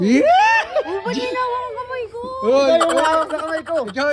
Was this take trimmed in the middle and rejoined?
no; 0 cuts

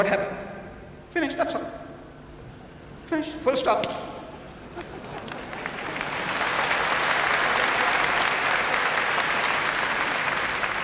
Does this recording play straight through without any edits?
yes; 0 cuts

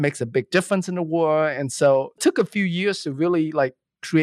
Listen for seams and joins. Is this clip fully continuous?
no; 1 cut; at 2.2 s

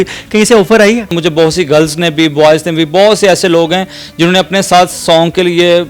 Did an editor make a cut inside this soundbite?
yes; 1 cut; at 1.1 s

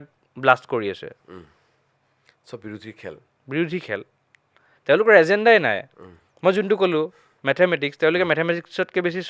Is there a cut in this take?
no; 0 cuts

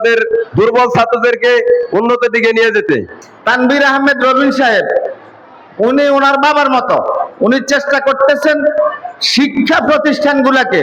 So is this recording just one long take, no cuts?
no; 1 cut; at 3.3 s

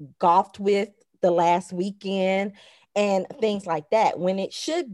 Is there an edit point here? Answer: no; 0 cuts

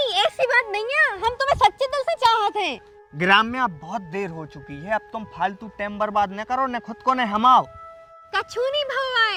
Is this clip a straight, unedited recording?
yes; 0 cuts

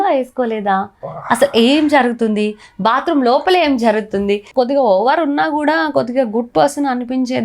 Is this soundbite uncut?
no; 1 cut; at 4.4 s

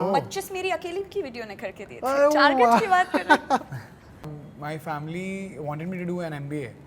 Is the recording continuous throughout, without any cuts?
no; 1 cut; at 4.4 s

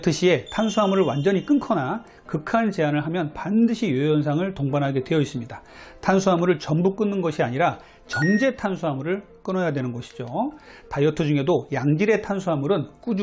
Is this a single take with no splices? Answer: yes; 0 cuts

